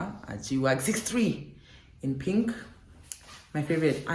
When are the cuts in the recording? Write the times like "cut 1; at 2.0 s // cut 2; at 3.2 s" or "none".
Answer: none